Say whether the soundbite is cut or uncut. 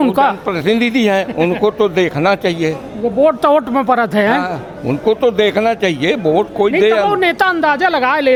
uncut